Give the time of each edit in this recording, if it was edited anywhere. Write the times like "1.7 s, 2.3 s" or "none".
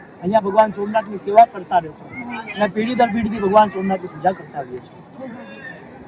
none